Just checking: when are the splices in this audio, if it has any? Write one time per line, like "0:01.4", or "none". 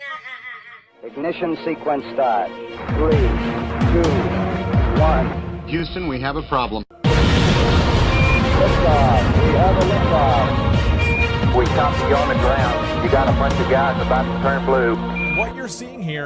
0:14.0

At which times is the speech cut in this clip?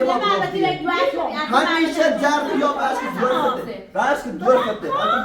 0:02.9

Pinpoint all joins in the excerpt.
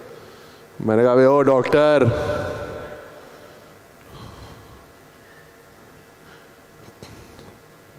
none

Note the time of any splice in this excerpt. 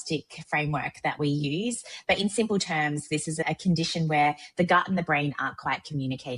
none

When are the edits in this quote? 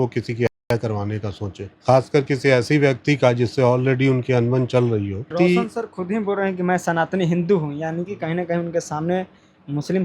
0:01.7
0:05.3

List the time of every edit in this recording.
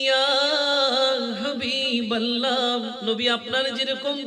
0:02.9

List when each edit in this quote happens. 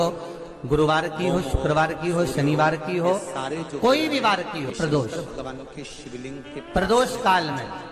0:04.7

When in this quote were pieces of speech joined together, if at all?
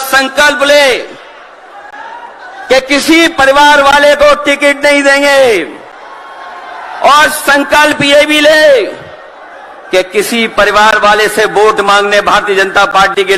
none

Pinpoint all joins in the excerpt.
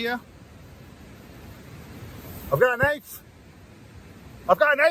none

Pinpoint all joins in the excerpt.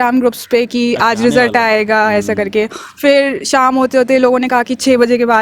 none

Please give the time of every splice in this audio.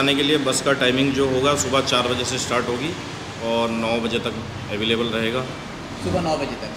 none

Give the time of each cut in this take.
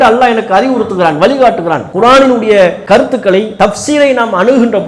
0:01.9
0:03.3

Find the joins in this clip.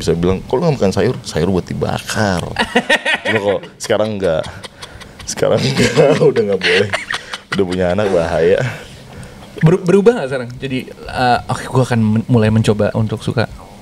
none

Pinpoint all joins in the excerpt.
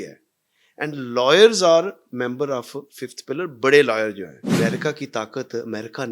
0:04.5

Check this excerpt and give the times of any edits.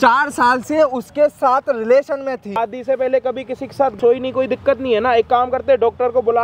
0:02.6
0:04.0

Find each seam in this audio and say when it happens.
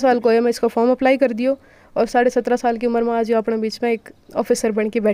none

